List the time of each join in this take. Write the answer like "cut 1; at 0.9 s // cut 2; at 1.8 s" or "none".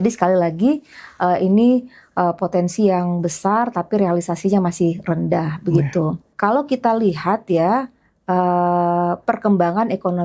cut 1; at 6.2 s